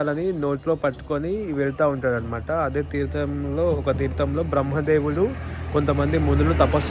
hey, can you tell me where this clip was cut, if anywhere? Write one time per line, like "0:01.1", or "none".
none